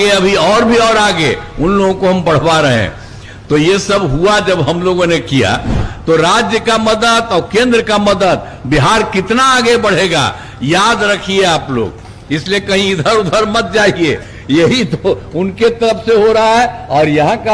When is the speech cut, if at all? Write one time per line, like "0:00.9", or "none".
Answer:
0:05.9